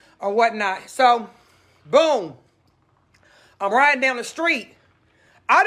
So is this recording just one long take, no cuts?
yes; 0 cuts

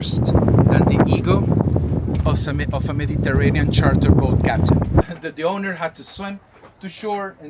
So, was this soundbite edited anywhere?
yes; 1 cut; at 5.0 s

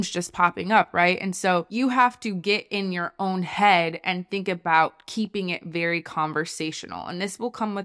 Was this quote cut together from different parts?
no; 0 cuts

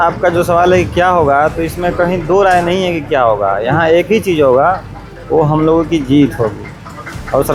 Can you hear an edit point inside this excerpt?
no; 0 cuts

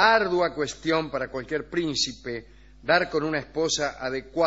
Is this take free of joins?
no; 1 cut; at 2.8 s

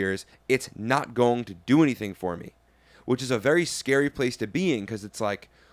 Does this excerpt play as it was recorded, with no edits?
yes; 0 cuts

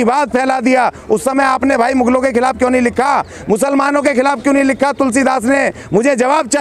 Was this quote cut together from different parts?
no; 0 cuts

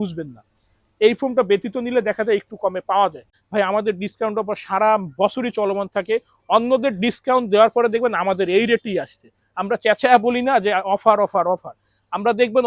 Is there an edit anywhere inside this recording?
yes; 1 cut; at 3.3 s

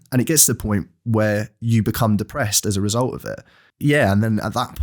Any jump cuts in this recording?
yes; 1 cut; at 3.6 s

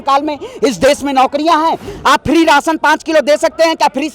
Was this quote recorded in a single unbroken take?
no; 1 cut; at 1.9 s

